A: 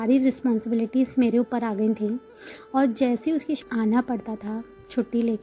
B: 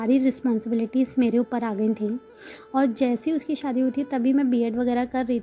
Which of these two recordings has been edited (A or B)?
A